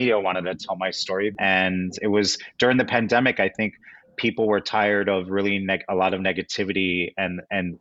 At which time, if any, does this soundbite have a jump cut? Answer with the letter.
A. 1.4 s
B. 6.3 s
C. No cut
A